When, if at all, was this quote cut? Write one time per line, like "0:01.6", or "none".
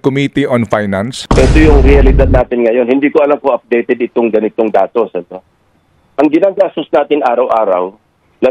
0:01.2

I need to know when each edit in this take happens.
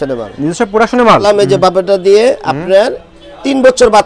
0:01.2

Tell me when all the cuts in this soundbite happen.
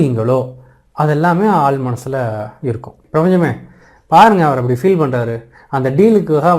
0:03.0

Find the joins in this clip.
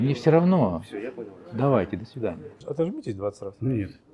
0:02.5

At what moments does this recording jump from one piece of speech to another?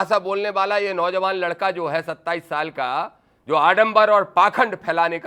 none

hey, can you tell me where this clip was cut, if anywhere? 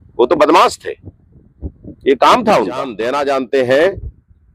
0:03.0

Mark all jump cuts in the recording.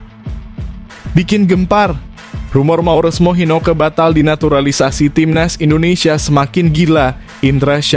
0:01.1

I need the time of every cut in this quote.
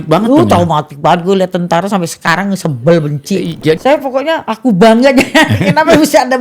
0:03.8

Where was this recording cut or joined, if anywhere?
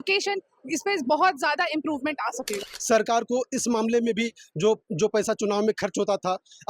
0:02.6

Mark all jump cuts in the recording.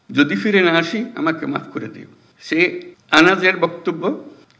0:02.9

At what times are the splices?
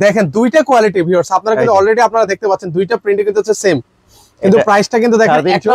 none

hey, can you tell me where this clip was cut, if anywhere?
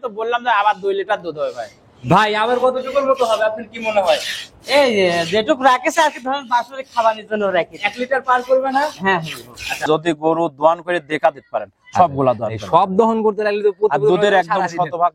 0:09.8

